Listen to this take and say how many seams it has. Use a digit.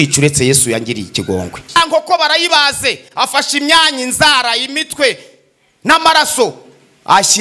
1